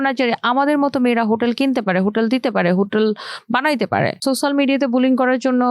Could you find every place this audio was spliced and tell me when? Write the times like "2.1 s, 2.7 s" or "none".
4.2 s